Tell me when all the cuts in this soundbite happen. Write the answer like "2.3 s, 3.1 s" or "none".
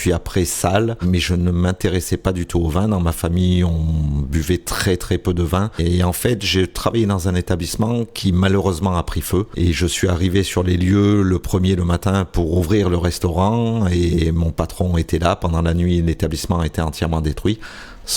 1.0 s, 5.8 s, 9.5 s